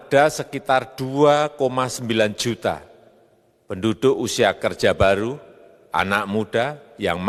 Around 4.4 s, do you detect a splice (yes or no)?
no